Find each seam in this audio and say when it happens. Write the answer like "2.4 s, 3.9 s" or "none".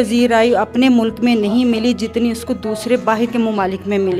none